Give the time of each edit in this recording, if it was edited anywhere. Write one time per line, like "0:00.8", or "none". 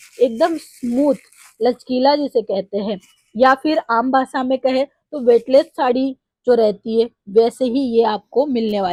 none